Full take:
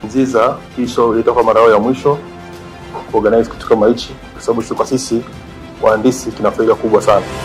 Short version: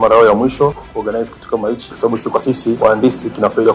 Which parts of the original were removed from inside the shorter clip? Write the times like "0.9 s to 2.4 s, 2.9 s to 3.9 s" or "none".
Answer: 2.3 s to 3.1 s, 4.5 s to 5.3 s